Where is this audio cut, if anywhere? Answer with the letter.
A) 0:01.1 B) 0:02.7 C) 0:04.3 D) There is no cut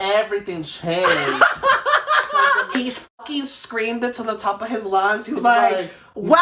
B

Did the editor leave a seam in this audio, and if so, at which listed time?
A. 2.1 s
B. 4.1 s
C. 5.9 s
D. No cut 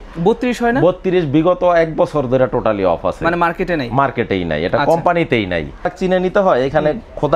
C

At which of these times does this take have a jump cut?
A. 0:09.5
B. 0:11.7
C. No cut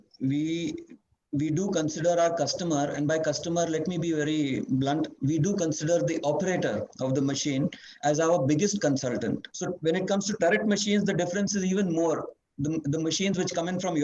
A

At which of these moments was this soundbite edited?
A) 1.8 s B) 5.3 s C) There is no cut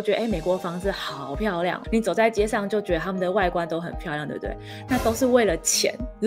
A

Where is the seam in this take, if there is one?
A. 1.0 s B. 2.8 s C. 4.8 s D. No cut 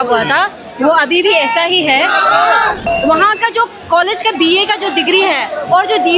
B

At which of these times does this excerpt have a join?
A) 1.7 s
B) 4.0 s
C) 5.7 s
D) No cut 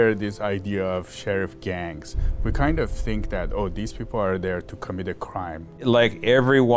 C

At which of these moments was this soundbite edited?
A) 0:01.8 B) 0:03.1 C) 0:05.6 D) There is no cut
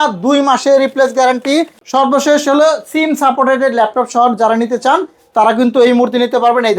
A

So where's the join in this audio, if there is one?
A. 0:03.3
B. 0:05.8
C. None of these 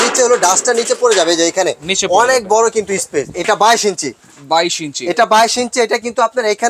A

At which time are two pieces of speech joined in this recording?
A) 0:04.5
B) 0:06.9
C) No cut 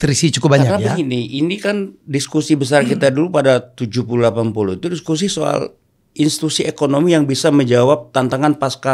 C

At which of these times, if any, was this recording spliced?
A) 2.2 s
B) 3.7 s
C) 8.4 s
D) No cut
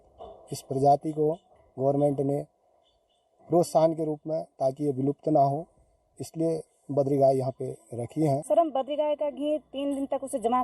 C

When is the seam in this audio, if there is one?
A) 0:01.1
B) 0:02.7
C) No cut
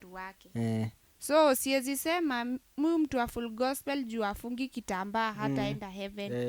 A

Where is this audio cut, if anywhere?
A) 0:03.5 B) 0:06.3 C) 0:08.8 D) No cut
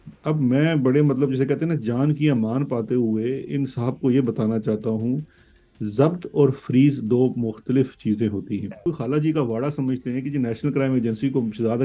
C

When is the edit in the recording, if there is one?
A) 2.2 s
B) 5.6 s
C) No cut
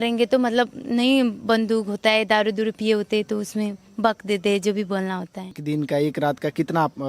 B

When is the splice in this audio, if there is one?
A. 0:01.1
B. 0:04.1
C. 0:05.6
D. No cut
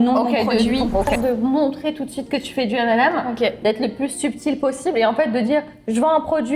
A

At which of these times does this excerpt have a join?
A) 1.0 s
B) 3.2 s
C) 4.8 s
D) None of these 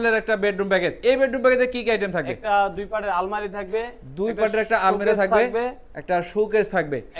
A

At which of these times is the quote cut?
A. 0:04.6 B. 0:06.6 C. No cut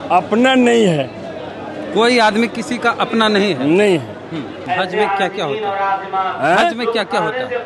A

